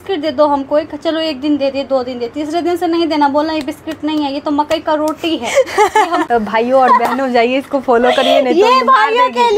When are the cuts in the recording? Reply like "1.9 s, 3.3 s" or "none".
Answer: 6.2 s